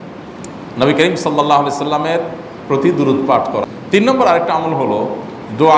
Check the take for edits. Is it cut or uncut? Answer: cut